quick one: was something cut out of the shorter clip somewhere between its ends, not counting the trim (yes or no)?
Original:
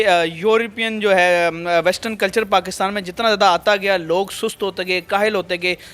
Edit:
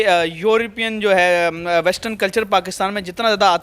no